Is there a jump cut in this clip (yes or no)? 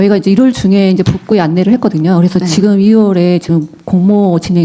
no